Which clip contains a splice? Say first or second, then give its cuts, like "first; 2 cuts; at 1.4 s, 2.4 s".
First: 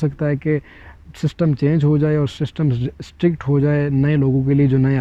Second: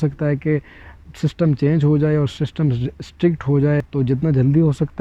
second; 1 cut; at 3.8 s